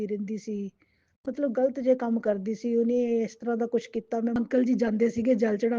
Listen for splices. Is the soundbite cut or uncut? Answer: cut